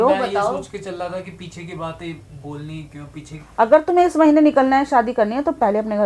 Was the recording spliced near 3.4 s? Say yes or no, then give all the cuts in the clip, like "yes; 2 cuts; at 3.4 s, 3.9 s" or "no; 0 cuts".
yes; 1 cut; at 3.4 s